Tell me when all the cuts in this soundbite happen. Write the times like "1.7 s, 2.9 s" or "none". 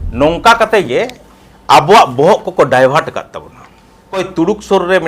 4.2 s